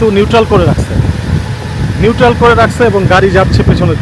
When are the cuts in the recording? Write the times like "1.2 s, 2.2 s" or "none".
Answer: none

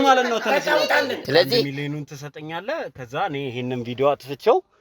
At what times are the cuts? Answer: 1.2 s

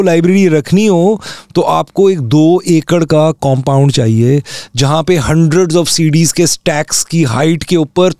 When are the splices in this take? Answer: none

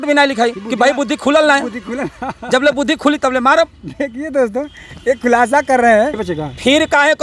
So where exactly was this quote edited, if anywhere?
6.2 s

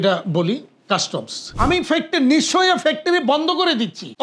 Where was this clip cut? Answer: 1.5 s

